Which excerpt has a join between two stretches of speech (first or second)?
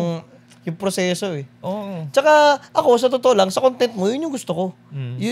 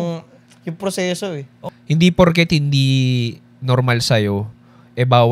second